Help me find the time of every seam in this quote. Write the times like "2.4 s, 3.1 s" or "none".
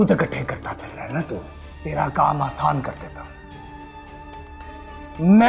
1.6 s